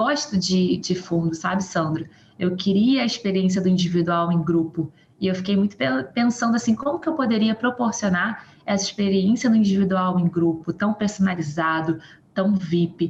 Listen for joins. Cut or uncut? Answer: uncut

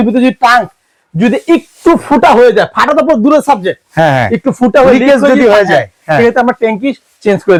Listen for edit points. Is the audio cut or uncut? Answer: uncut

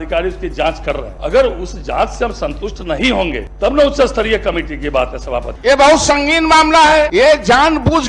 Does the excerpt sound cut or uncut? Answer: cut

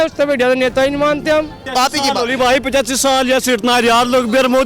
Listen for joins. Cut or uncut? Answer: cut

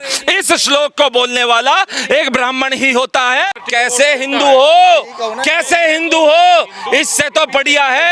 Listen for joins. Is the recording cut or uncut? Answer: cut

